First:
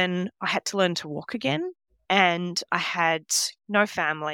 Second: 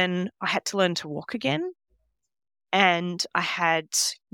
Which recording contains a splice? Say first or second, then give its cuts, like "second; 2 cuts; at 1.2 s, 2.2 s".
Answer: first; 1 cut; at 1.9 s